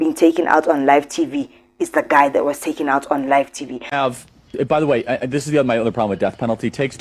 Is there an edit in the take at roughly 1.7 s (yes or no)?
no